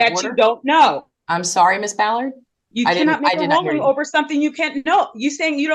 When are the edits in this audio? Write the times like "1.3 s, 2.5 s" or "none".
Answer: none